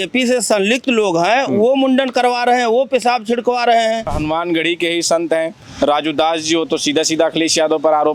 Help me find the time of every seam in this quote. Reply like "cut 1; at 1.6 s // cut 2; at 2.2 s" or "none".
cut 1; at 4.1 s